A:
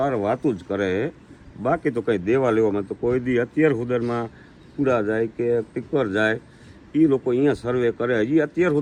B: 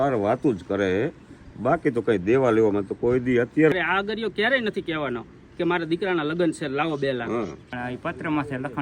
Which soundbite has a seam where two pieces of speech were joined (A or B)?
B